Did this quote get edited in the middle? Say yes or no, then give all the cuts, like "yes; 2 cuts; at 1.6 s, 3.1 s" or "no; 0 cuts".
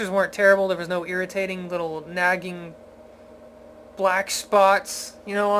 no; 0 cuts